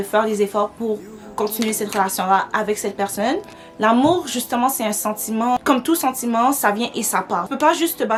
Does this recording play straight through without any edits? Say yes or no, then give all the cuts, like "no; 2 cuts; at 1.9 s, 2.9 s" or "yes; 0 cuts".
yes; 0 cuts